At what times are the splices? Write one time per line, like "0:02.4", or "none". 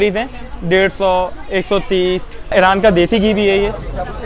0:02.5